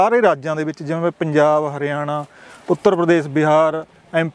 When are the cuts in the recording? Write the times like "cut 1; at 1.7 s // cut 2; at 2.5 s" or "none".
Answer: none